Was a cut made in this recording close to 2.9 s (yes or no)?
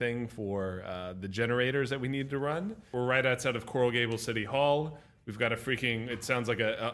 yes